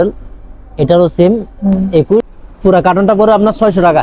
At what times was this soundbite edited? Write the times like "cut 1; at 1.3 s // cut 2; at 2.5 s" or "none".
cut 1; at 2.3 s